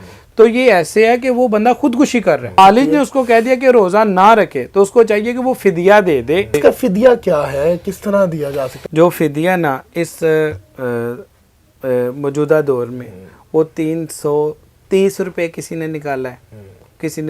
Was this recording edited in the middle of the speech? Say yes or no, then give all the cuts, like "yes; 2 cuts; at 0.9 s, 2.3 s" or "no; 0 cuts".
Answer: yes; 3 cuts; at 2.6 s, 6.6 s, 8.7 s